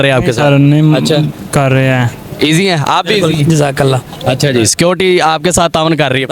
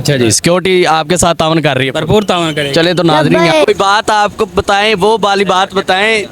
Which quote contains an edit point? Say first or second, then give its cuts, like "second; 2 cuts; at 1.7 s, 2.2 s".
second; 1 cut; at 3.3 s